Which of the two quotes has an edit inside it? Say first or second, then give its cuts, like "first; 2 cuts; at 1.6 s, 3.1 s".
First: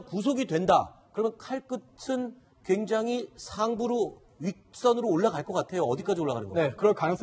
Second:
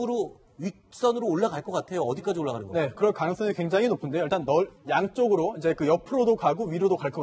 first; 1 cut; at 1.4 s